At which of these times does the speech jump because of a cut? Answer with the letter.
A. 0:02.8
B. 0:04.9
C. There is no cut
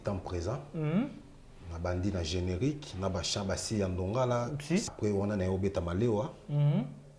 B